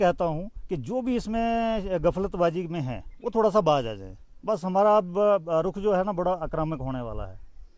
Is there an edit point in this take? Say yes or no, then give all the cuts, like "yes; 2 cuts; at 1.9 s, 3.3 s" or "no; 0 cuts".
no; 0 cuts